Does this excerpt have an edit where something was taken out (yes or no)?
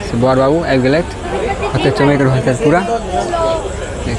no